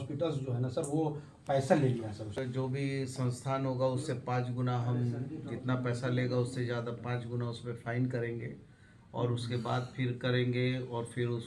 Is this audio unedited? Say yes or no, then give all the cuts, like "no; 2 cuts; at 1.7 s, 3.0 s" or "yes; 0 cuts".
no; 1 cut; at 2.4 s